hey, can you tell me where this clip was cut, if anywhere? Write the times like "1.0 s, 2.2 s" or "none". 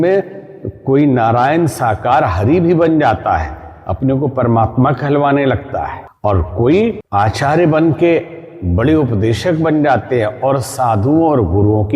6.0 s, 7.0 s